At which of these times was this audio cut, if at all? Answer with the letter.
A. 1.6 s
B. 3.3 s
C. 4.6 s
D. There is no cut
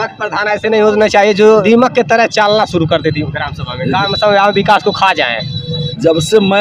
A